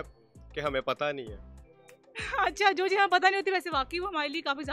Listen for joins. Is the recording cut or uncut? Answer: uncut